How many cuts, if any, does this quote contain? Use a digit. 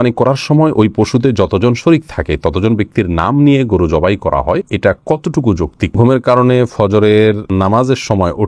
3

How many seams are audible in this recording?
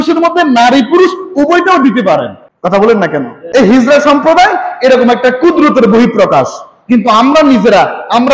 0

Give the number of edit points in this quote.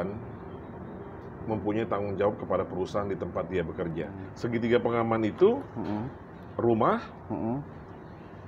1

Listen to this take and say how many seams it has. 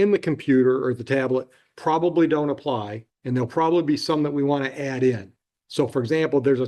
0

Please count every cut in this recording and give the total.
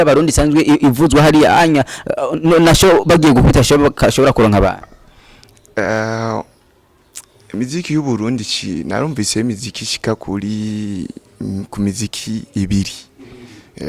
0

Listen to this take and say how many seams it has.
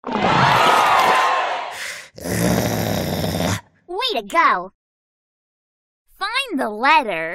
1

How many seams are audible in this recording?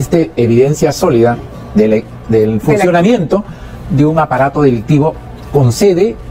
0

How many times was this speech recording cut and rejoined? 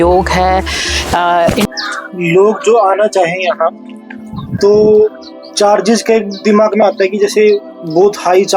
1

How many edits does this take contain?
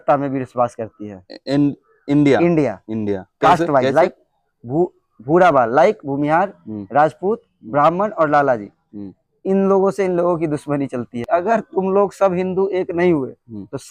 1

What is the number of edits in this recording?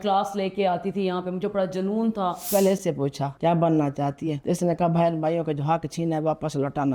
3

